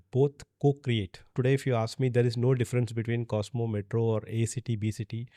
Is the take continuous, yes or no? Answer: no